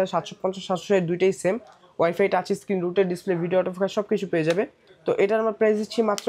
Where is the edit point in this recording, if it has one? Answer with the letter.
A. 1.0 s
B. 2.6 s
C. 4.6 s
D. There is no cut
D